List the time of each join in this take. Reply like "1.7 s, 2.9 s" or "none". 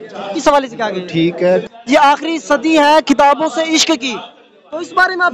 1.6 s